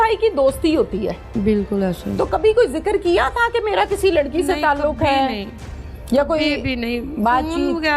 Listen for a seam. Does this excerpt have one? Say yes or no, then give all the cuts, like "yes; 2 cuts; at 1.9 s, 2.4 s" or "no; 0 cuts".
yes; 1 cut; at 1.4 s